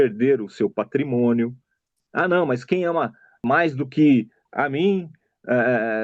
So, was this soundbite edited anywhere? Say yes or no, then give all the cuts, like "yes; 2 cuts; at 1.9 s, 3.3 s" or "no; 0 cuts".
yes; 3 cuts; at 2.0 s, 3.3 s, 4.4 s